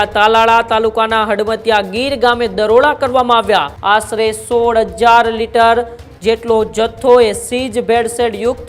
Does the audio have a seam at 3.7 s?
yes; 1 cut; at 3.7 s

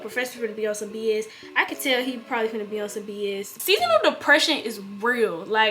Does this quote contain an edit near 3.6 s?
yes; 1 cut; at 3.6 s

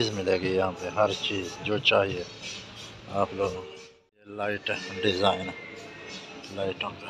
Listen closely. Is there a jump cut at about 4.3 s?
yes; 1 cut; at 4.3 s

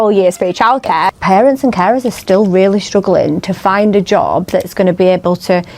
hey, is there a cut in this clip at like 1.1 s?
yes; 1 cut; at 1.1 s

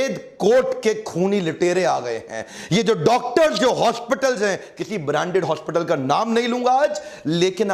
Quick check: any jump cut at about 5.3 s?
no; 0 cuts

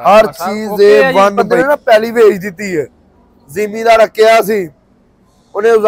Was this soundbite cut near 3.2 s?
no; 1 cut; at 1.4 s

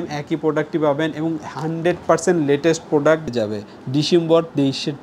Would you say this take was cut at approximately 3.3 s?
yes; 1 cut; at 3.3 s

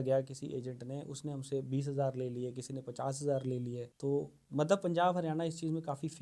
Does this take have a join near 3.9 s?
yes; 1 cut; at 3.9 s

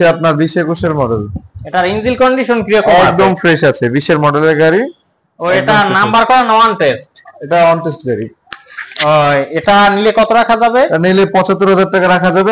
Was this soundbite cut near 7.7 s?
no; 0 cuts

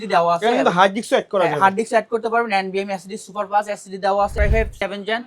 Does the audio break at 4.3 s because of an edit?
yes; 1 cut; at 4.3 s

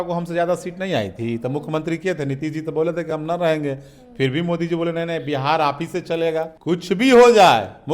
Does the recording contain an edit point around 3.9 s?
no; 1 cut; at 6.5 s

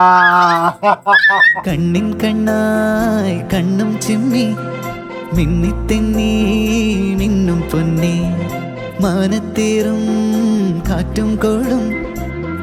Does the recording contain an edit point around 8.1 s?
no; 0 cuts

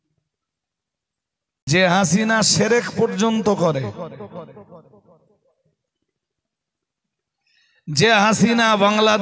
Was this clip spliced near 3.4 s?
no; 1 cut; at 1.7 s

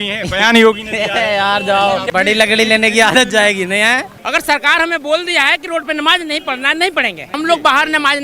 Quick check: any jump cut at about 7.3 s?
yes; 3 cuts; at 2.1 s, 4.1 s, 7.3 s

